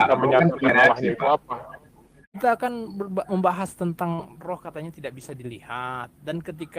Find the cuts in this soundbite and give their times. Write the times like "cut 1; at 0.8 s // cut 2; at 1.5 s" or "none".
cut 1; at 2.4 s

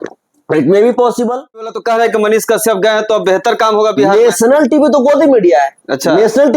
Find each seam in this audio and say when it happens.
cut 1; at 1.7 s

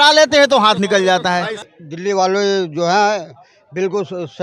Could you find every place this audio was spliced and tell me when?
cut 1; at 1.6 s

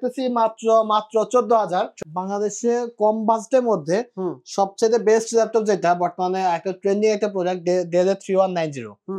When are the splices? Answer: cut 1; at 2.0 s

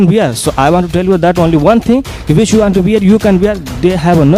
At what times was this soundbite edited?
none

